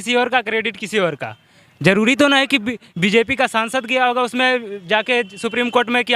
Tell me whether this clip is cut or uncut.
uncut